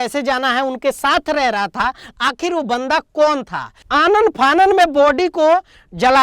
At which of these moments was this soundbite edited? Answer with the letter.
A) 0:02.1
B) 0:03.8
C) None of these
B